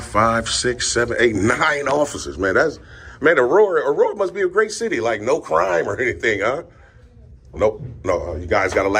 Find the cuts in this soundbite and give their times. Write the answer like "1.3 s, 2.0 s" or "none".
none